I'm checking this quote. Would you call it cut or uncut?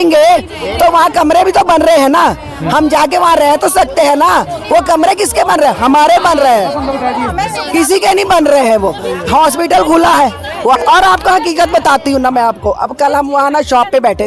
cut